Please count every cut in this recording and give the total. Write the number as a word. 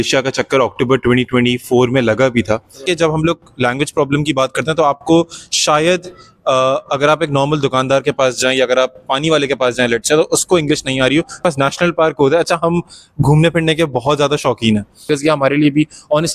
three